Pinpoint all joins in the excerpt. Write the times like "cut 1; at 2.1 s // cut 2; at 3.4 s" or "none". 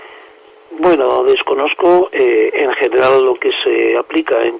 cut 1; at 3.0 s